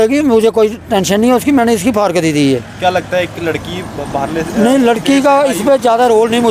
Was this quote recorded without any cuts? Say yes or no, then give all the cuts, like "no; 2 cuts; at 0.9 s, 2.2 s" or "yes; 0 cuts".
yes; 0 cuts